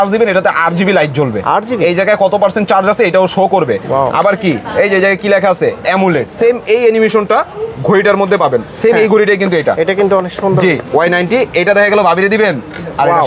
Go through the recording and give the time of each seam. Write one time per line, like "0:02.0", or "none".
0:06.3
0:10.8